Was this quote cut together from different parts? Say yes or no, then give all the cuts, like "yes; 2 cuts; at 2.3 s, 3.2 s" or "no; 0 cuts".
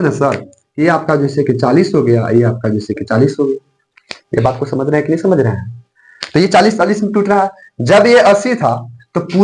no; 0 cuts